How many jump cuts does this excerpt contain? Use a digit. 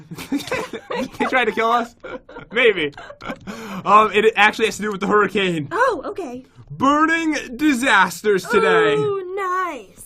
1